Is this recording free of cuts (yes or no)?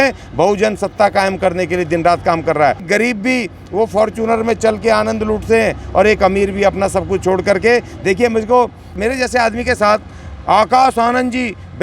no